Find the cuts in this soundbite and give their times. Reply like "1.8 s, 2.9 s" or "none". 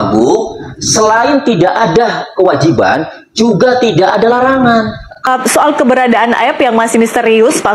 5.3 s